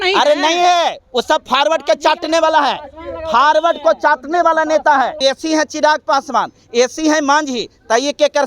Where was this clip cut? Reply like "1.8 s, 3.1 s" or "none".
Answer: 5.2 s